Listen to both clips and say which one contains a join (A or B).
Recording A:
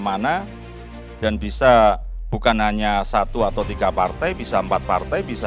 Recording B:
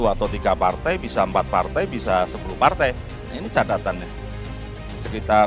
B